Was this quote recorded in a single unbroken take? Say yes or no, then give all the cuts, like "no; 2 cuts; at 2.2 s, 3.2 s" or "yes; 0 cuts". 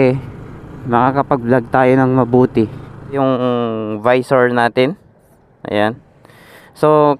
no; 1 cut; at 3.2 s